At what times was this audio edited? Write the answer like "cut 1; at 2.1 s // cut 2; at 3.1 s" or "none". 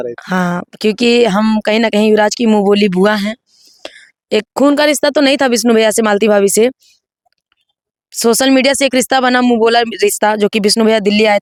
none

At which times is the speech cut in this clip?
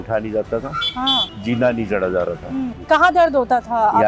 cut 1; at 1.3 s // cut 2; at 2.8 s

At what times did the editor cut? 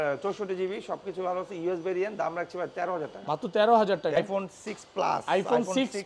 cut 1; at 4.2 s

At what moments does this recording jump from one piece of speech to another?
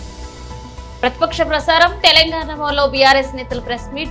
cut 1; at 1.0 s

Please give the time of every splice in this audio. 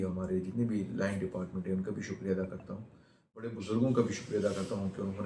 cut 1; at 3.6 s

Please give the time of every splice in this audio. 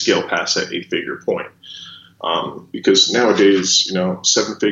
none

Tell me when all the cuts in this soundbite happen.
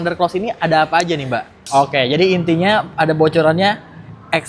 cut 1; at 1.6 s

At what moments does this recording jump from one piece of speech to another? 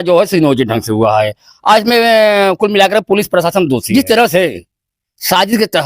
cut 1; at 3.8 s

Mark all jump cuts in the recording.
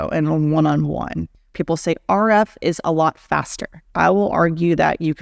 cut 1; at 1.5 s // cut 2; at 3.8 s

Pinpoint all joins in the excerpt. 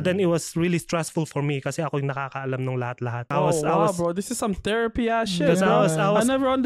cut 1; at 3.2 s

